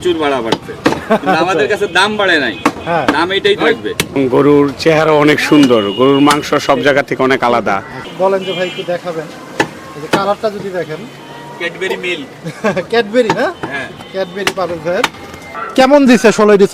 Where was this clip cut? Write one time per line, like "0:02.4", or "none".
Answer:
0:04.2
0:08.1
0:15.6